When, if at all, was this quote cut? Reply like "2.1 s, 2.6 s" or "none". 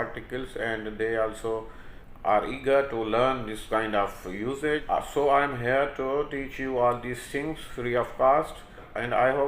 4.8 s